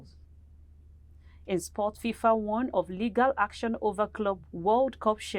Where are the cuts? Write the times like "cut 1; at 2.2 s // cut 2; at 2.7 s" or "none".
cut 1; at 4.5 s